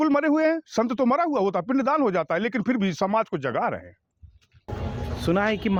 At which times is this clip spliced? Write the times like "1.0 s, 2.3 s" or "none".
none